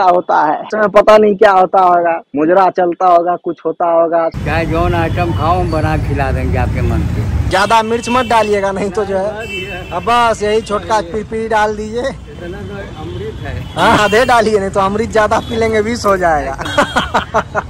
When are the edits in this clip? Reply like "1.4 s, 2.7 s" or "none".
4.4 s, 14.0 s, 16.7 s